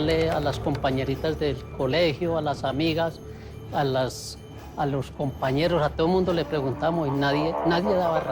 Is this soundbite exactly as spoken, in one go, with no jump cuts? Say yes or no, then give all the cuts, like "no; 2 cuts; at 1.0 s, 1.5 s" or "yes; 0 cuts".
yes; 0 cuts